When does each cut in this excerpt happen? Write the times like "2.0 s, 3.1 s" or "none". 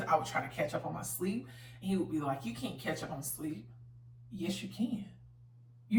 none